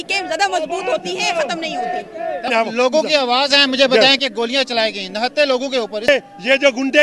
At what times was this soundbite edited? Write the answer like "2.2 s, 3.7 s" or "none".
2.5 s, 6.1 s

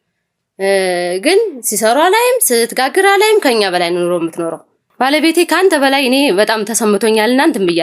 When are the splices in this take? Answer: 4.9 s

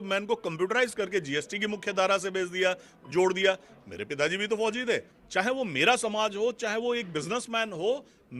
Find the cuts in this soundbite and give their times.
5.1 s

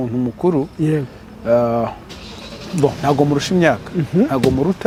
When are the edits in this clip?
none

